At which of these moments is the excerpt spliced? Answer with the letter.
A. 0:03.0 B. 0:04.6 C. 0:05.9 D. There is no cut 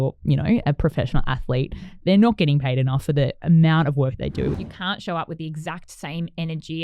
B